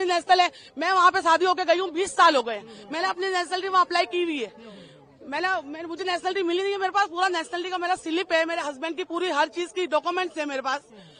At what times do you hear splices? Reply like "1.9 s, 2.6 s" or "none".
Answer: none